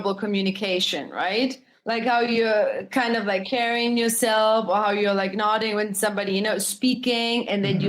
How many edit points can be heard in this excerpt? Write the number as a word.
one